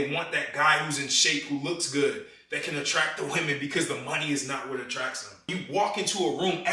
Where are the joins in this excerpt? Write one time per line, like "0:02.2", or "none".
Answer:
0:05.5